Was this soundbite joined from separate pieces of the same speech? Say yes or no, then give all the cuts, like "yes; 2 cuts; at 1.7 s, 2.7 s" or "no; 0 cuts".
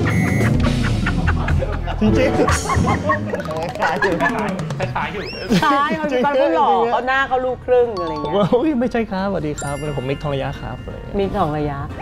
no; 0 cuts